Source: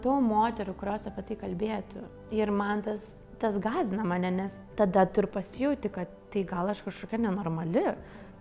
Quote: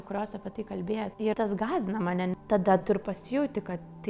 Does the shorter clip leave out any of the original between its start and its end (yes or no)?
yes